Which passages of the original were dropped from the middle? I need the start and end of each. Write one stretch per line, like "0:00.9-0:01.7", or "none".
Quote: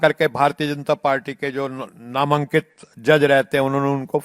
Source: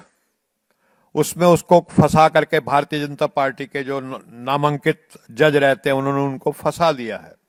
none